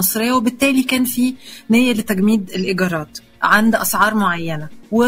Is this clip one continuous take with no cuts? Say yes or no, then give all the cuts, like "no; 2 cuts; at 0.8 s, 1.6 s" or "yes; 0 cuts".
yes; 0 cuts